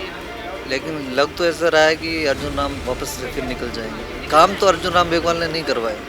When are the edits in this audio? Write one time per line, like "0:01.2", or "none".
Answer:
0:04.1